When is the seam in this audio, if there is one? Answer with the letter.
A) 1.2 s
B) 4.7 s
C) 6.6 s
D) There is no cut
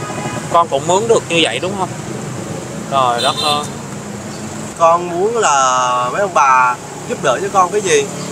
B